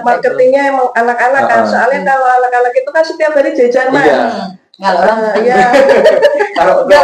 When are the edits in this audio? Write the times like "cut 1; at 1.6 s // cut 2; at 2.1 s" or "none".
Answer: none